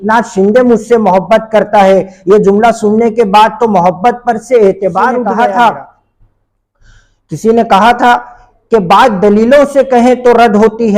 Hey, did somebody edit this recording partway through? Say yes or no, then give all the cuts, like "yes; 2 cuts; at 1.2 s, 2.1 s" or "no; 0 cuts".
yes; 1 cut; at 5.2 s